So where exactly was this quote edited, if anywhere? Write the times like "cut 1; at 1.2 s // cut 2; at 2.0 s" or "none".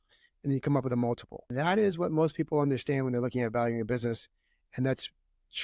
cut 1; at 1.4 s